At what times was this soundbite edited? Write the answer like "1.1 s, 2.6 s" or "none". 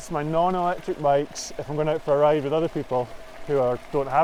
none